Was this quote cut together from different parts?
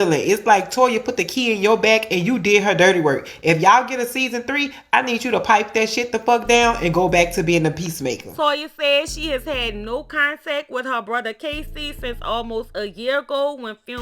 no; 0 cuts

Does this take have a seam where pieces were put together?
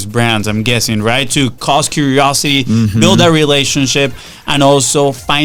no; 0 cuts

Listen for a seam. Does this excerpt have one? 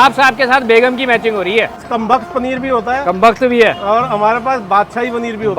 yes; 1 cut; at 1.8 s

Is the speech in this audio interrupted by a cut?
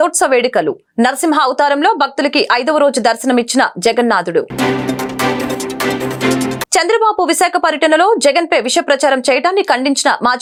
no; 0 cuts

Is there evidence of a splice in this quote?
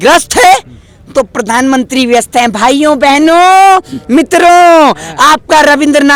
no; 0 cuts

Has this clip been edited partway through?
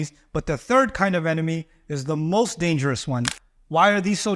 yes; 1 cut; at 3.4 s

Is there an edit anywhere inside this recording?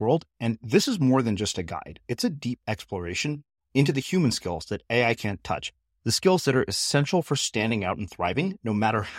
no; 0 cuts

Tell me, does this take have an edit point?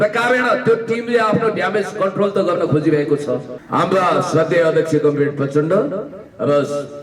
yes; 1 cut; at 3.5 s

